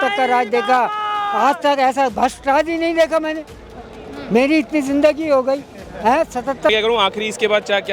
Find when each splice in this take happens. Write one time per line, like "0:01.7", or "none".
0:06.7